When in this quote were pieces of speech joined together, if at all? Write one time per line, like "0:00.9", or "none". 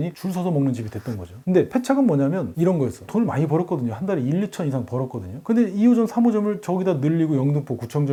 none